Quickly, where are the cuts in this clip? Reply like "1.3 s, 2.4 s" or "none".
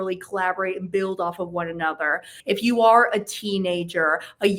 2.3 s